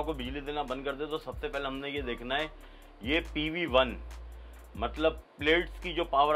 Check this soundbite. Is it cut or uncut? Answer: uncut